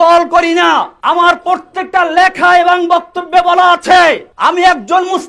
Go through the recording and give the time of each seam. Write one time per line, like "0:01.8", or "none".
0:00.9
0:04.3